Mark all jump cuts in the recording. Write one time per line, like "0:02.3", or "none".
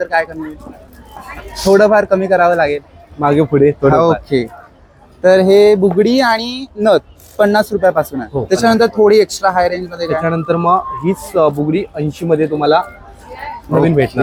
none

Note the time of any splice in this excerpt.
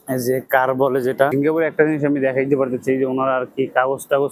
0:01.3

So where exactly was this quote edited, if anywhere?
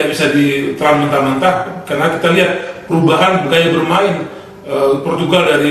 0:03.7

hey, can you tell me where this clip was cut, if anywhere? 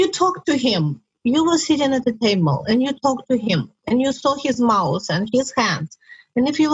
0:01.0

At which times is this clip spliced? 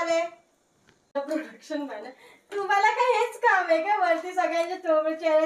0:01.1

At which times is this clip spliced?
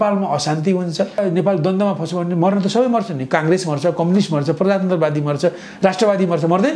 0:01.2

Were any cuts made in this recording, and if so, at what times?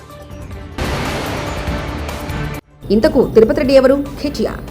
0:00.8
0:02.7

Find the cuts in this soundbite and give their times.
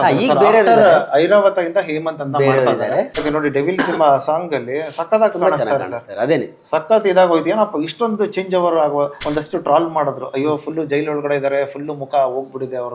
0:03.2
0:09.2

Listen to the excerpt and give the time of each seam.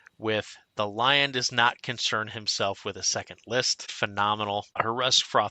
0:03.8
0:04.8

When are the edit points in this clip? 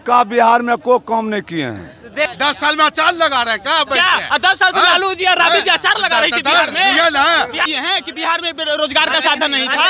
0:02.3
0:07.7

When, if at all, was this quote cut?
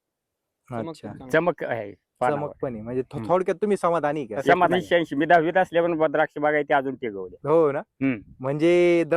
0:04.7

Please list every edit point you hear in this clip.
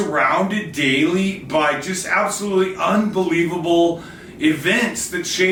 none

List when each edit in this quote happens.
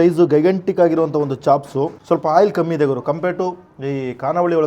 0:02.0

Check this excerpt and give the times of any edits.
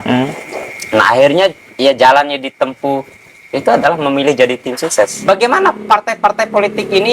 0:05.2

